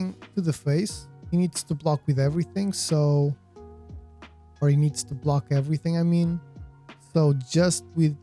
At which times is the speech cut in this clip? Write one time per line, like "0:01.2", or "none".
none